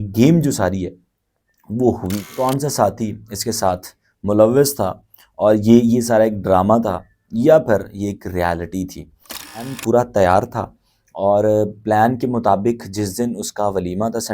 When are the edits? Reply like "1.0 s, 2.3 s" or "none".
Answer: 2.3 s, 9.6 s